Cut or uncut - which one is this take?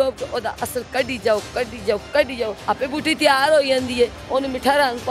cut